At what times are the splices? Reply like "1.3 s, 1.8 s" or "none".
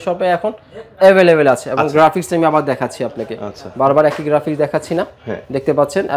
none

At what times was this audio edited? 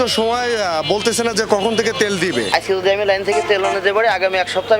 2.5 s

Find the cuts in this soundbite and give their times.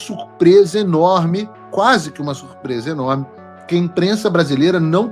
none

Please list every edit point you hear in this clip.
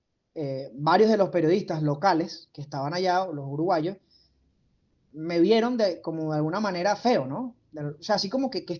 none

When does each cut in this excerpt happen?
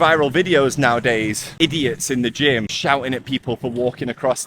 1.5 s, 2.7 s

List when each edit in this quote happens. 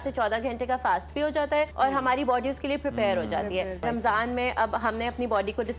1.7 s, 3.8 s

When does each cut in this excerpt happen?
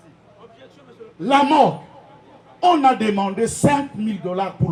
none

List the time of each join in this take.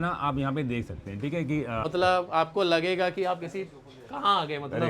1.8 s

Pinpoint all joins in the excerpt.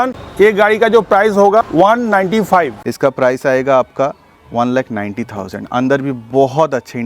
2.8 s

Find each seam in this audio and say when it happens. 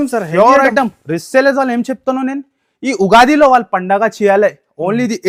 none

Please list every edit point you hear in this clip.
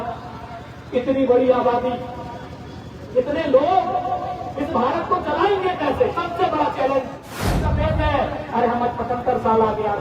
7.7 s

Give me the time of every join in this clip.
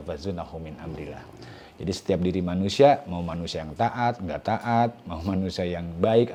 none

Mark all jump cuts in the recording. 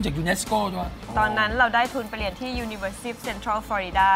1.0 s

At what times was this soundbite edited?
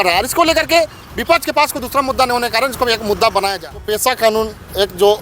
3.6 s

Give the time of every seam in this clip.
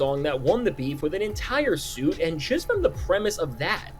none

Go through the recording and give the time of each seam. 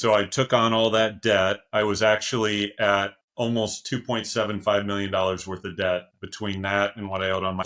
none

